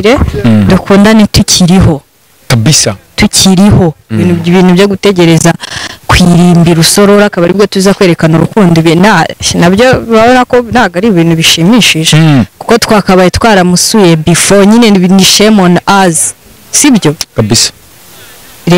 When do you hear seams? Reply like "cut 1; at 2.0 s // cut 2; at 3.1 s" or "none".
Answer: none